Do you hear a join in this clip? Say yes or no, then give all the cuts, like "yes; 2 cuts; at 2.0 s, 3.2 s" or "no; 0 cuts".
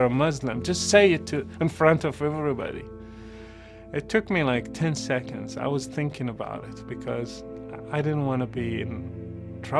no; 0 cuts